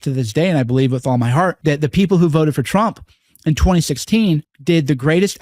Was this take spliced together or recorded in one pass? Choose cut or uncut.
cut